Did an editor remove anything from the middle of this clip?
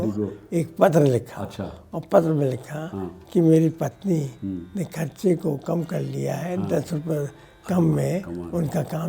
no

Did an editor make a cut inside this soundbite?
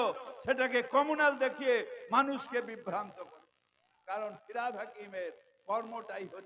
yes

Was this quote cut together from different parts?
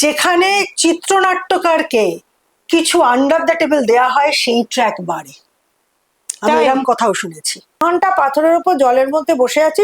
yes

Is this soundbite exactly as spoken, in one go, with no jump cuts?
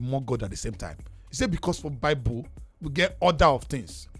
yes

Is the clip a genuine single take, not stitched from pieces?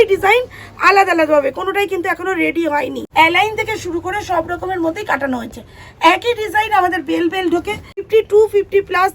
no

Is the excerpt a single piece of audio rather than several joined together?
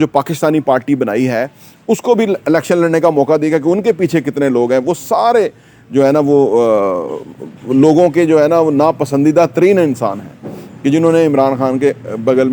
yes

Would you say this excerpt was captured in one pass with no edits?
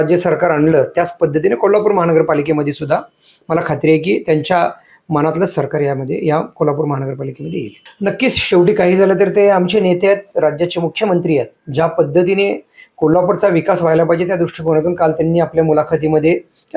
no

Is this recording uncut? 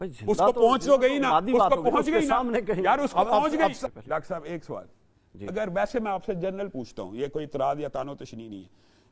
no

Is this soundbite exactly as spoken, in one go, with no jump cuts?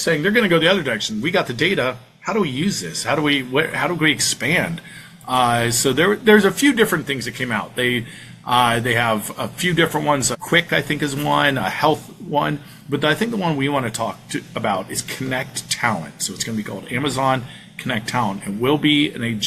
yes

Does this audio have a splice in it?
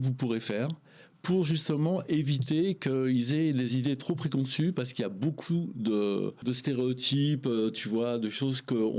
yes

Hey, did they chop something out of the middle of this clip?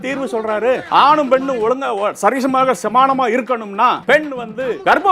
yes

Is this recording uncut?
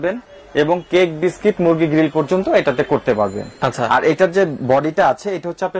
yes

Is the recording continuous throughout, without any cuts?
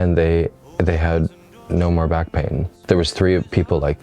no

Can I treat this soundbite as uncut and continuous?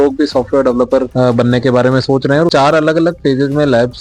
no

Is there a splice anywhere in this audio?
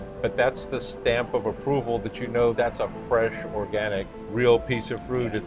no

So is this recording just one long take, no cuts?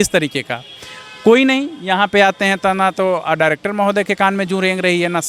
yes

